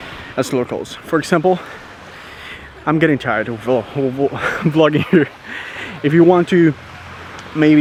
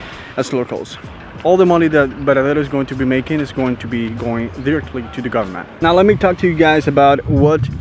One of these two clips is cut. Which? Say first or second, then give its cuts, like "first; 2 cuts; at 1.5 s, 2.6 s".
second; 2 cuts; at 0.9 s, 5.6 s